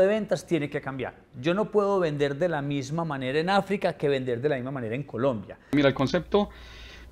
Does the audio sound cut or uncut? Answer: cut